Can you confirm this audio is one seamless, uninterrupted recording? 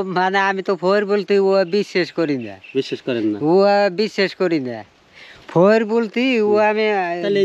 yes; 0 cuts

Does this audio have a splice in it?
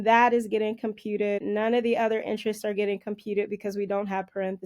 yes; 1 cut; at 1.4 s

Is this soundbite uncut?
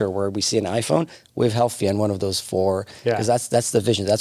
yes; 0 cuts

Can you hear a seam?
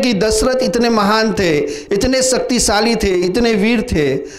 no; 0 cuts

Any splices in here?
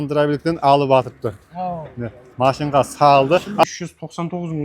yes; 1 cut; at 3.6 s

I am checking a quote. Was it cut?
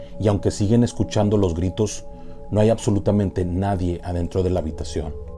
no; 0 cuts

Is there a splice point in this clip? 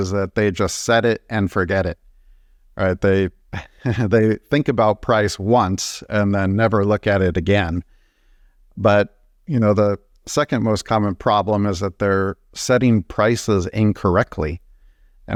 no; 0 cuts

